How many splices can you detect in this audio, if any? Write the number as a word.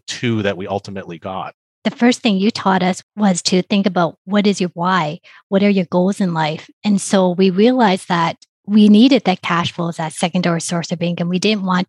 two